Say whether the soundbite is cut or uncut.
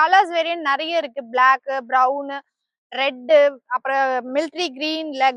uncut